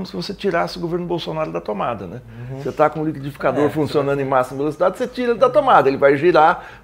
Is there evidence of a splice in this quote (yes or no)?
no